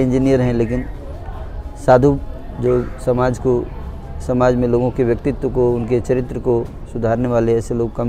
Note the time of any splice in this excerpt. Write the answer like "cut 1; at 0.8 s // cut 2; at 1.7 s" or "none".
none

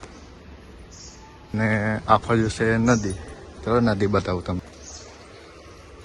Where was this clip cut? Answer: cut 1; at 1.5 s // cut 2; at 4.6 s

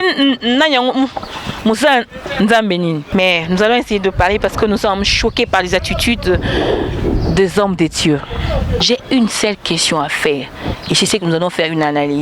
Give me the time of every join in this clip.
cut 1; at 3.1 s // cut 2; at 8.8 s

